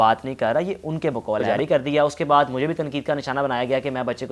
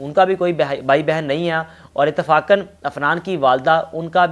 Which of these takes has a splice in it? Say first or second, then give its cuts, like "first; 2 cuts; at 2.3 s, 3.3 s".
first; 1 cut; at 1.5 s